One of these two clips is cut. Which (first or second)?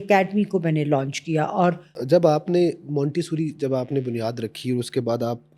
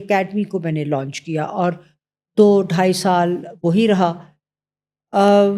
first